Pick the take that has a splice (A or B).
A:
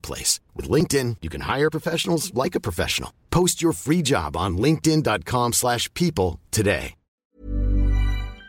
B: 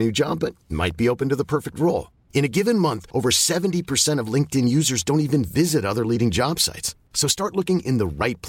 A